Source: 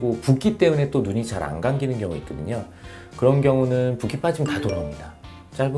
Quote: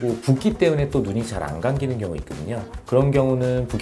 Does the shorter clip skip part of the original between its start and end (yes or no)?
yes